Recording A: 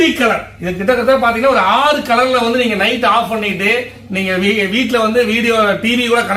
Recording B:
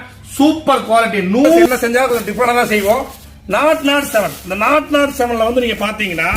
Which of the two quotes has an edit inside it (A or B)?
B